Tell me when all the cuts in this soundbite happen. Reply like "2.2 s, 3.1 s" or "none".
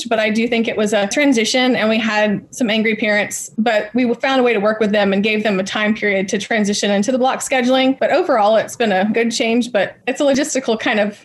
8.0 s, 10.4 s